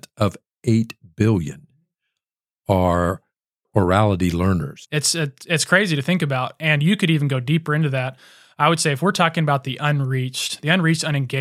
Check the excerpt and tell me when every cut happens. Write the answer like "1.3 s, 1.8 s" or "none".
4.8 s